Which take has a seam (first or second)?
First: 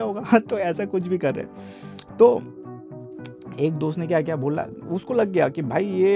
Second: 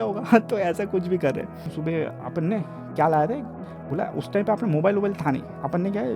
second